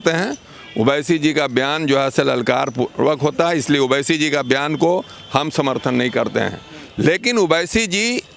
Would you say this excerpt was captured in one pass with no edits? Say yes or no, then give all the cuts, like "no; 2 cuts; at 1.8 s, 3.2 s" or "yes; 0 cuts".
yes; 0 cuts